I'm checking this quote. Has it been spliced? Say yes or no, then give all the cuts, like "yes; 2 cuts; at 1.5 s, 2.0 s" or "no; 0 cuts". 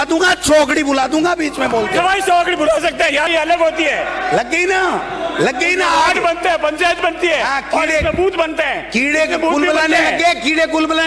yes; 1 cut; at 3.3 s